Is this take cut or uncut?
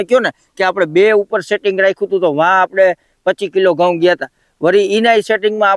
uncut